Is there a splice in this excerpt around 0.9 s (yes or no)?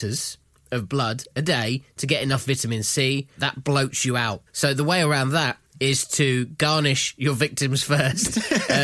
no